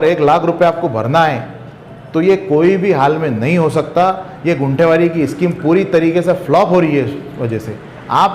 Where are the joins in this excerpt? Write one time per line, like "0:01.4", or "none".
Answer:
none

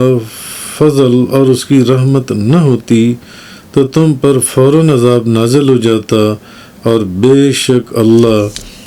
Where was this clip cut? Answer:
none

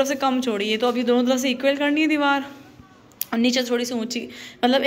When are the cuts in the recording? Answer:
none

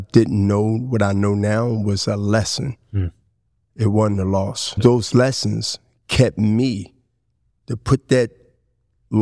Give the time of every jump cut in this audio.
0:04.8

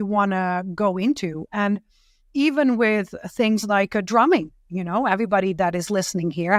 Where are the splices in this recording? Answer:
none

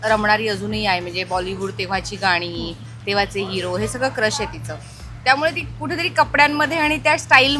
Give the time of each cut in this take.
none

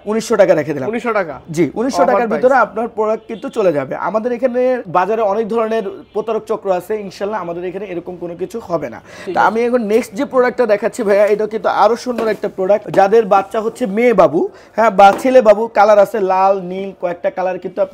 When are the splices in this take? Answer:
none

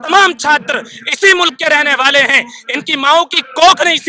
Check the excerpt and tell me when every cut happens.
none

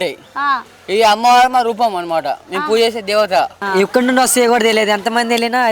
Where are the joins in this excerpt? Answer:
0:03.6

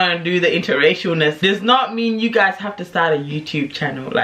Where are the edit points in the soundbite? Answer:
0:01.4

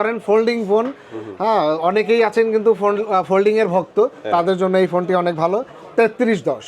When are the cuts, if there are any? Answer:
0:05.8

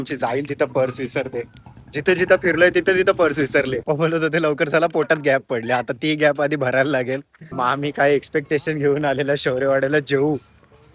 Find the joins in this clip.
0:03.8
0:07.7

